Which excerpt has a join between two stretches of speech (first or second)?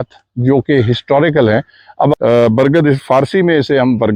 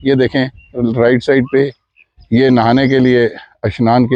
first